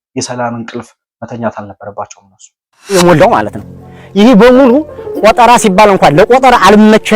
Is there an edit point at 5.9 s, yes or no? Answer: no